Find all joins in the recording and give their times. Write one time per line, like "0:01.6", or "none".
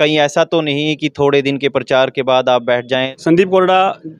0:03.1